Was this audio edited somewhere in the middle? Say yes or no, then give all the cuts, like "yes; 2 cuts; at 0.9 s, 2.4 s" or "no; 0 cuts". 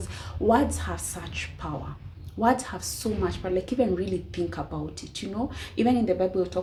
no; 0 cuts